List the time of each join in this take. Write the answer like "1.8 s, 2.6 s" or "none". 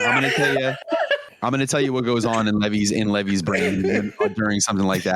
1.3 s